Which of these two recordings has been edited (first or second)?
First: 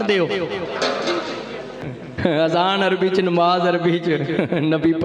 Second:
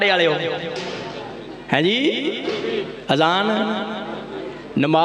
first